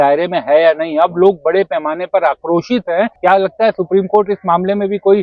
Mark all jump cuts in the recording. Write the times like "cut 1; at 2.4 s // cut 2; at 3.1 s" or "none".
cut 1; at 3.1 s